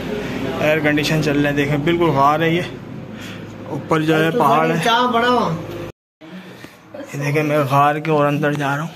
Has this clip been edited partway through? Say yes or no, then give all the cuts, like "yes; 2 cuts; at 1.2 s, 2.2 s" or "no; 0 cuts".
yes; 1 cut; at 6.0 s